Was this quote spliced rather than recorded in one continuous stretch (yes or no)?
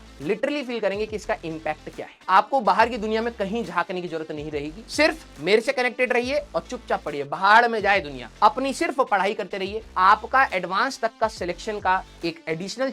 no